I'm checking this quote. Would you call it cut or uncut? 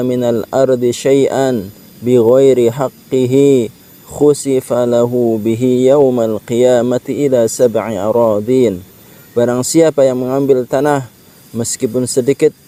uncut